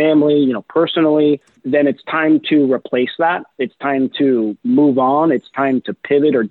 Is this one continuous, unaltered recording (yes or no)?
no